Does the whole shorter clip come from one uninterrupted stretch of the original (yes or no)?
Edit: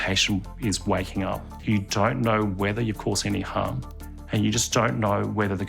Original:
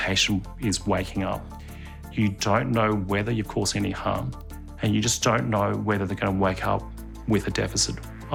no